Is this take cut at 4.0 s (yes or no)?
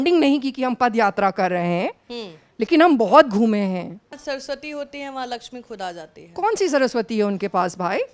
yes